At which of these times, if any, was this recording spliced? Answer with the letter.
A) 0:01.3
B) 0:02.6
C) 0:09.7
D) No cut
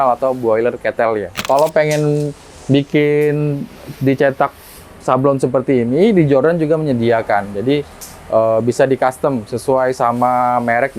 A